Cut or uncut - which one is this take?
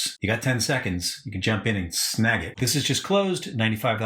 cut